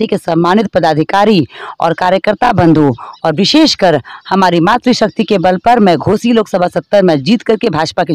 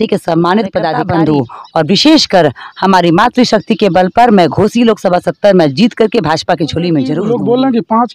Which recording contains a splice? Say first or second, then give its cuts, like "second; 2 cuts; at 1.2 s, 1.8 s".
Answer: second; 2 cuts; at 1.0 s, 7.2 s